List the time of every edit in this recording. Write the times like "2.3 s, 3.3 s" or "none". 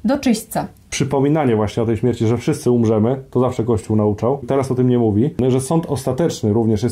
1.0 s, 4.5 s, 5.4 s